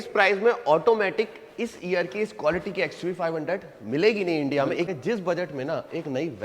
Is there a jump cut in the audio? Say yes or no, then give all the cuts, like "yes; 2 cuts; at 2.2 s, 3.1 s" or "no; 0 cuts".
yes; 1 cut; at 4.9 s